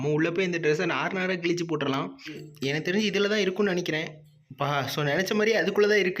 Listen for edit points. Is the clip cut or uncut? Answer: cut